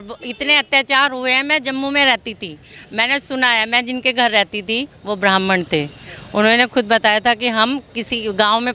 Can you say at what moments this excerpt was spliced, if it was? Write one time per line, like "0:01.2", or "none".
none